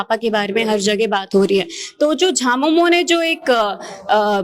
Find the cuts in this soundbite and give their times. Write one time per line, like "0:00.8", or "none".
none